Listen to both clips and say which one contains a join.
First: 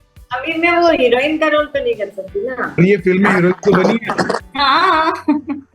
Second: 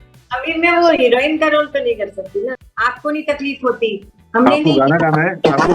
second; 1 cut; at 2.6 s

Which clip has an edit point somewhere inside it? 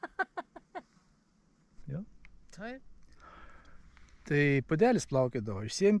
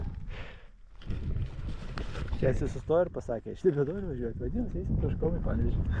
first; 1 cut; at 1.7 s

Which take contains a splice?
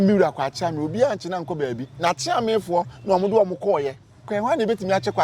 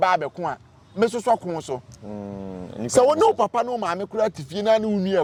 first; 1 cut; at 4.2 s

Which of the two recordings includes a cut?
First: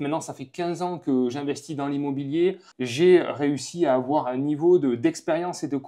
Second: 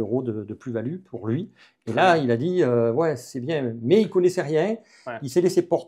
first; 1 cut; at 2.7 s

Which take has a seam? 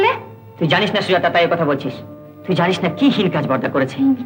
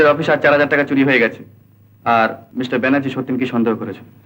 second; 1 cut; at 2.4 s

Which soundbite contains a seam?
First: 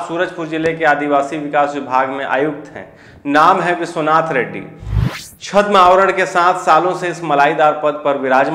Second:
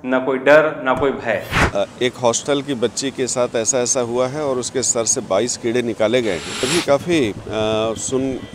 second; 2 cuts; at 1.6 s, 6.7 s

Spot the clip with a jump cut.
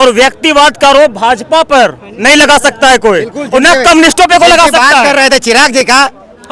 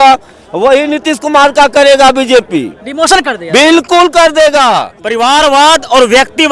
second; 1 cut; at 5.0 s

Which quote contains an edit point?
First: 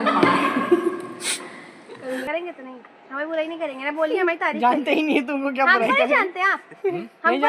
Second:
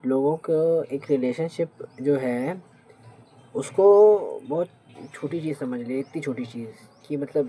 first; 1 cut; at 2.3 s

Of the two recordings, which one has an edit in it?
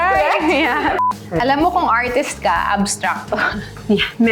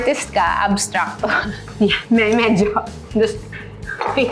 first; 1 cut; at 1.0 s

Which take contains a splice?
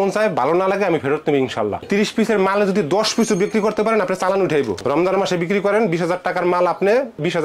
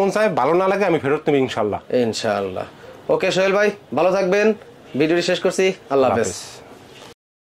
first; 2 cuts; at 1.8 s, 4.8 s

